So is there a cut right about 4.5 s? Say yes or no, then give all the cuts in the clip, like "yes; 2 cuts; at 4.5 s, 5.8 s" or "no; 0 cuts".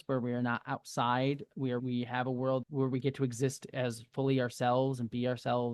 no; 2 cuts; at 1.8 s, 2.7 s